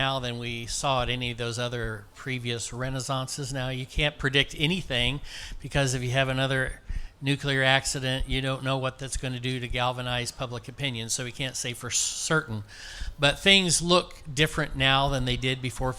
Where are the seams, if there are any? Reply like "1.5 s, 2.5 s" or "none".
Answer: none